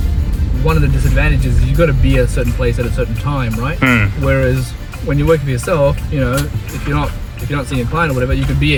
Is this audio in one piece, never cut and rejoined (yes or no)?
yes